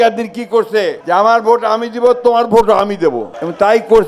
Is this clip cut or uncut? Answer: cut